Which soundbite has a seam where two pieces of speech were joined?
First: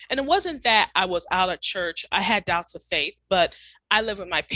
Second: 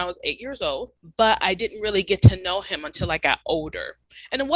second; 1 cut; at 1.0 s

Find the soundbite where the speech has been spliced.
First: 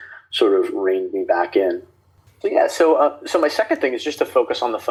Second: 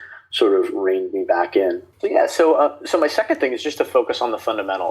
second; 1 cut; at 1.9 s

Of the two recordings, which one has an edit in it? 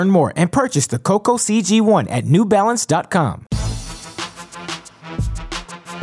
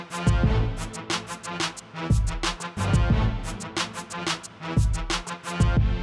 first; 1 cut; at 3.4 s

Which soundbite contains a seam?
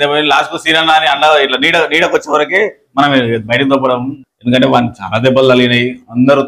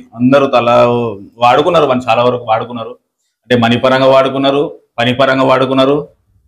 first; 1 cut; at 4.2 s

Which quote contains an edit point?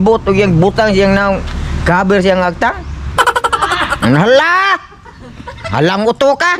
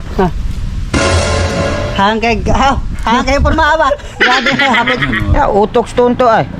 second; 1 cut; at 5.3 s

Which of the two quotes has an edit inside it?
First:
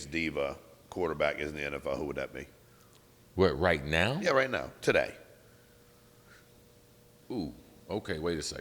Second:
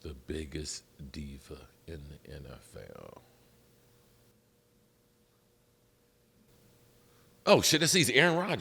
second; 2 cuts; at 4.3 s, 6.5 s

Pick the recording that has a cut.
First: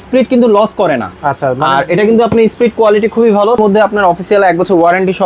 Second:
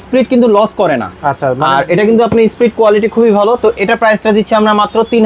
first; 1 cut; at 3.6 s

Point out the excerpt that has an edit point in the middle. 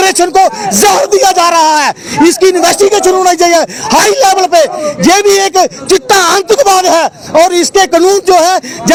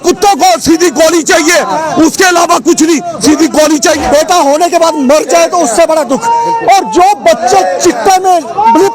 second; 1 cut; at 4.0 s

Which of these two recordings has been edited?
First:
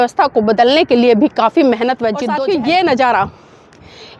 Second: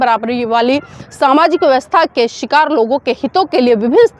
first; 1 cut; at 2.2 s

